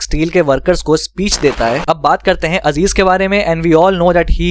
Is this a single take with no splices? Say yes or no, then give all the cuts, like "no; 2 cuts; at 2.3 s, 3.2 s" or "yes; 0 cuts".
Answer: no; 1 cut; at 1.8 s